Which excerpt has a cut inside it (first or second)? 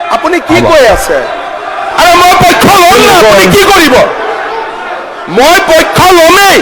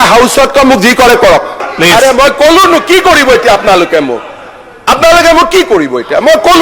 second